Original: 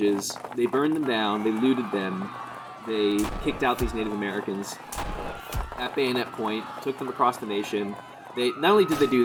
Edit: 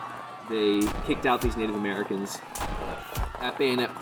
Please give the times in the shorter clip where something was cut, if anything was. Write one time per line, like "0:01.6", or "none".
none

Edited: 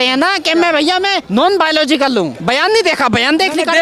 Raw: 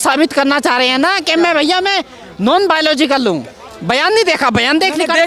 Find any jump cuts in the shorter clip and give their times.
0:01.2
0:02.4

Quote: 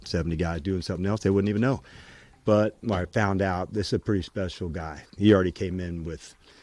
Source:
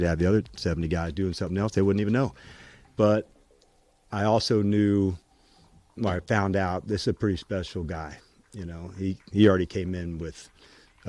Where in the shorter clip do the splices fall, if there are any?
0:02.8
0:05.1

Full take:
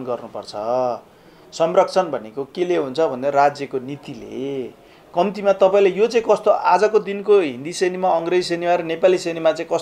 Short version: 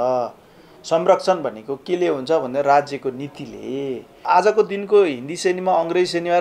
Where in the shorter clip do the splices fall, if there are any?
0:04.2

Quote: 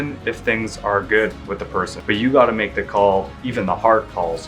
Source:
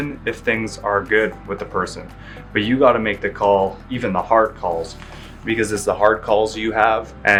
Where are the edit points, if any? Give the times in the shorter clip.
0:01.9

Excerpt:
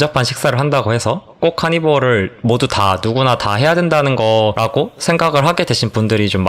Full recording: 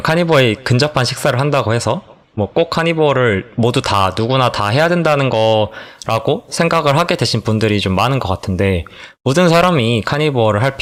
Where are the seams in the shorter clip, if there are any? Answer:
0:01.4
0:04.6

